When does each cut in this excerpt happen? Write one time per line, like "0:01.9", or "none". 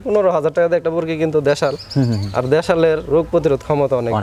none